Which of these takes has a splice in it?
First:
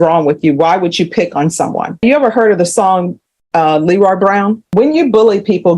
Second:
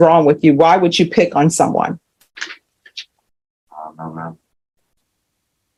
first; 2 cuts; at 2.0 s, 4.6 s

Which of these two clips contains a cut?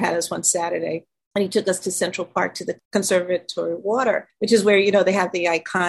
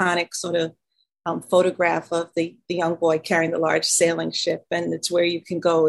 first; 3 cuts; at 1.1 s, 2.8 s, 4.3 s

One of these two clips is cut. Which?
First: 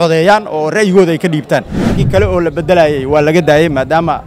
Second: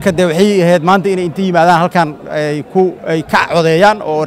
first; 1 cut; at 2.0 s

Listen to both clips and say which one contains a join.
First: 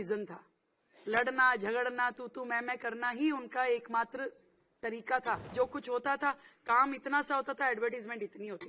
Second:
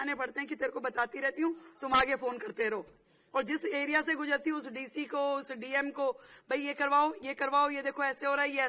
first; 1 cut; at 5.5 s

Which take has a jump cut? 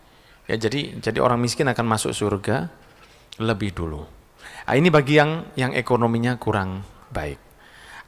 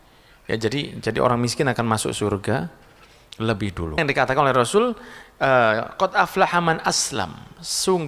second; 1 cut; at 4.0 s

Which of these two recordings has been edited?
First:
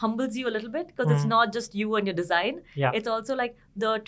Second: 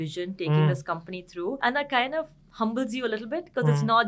second; 1 cut; at 1.6 s

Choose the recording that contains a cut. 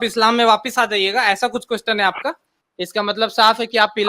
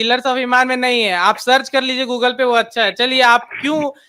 first; 1 cut; at 2.5 s

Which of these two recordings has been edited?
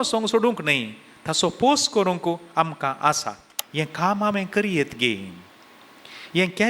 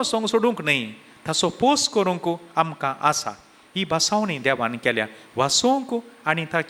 first; 1 cut; at 3.6 s

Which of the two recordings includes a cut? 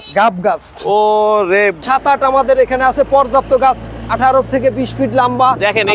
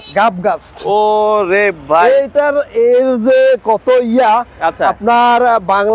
first; 1 cut; at 1.8 s

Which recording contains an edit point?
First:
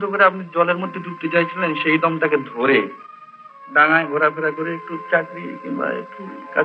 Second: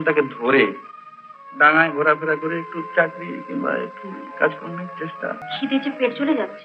second; 1 cut; at 5.5 s

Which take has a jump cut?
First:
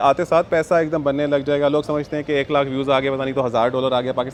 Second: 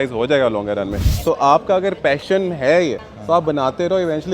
second; 2 cuts; at 1.1 s, 3.1 s

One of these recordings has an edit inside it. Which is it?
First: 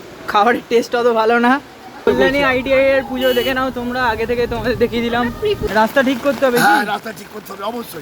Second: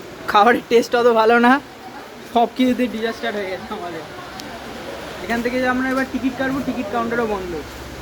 first; 2 cuts; at 2.1 s, 5.6 s

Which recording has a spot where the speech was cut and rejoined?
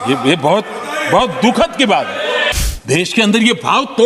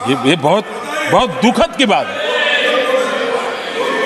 first; 1 cut; at 2.5 s

